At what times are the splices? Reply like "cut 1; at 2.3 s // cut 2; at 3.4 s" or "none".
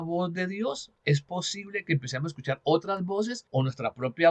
cut 1; at 0.9 s // cut 2; at 3.4 s